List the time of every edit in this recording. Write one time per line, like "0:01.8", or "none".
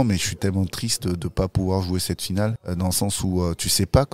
0:02.5